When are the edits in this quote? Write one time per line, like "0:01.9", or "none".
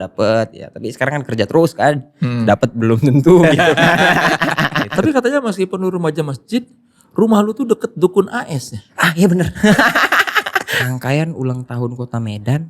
0:04.8
0:10.8